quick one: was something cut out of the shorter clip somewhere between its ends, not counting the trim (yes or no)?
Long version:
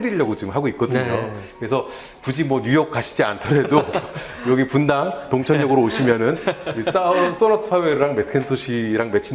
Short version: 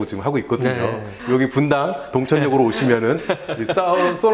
yes